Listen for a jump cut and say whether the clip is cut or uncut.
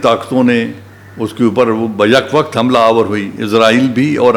uncut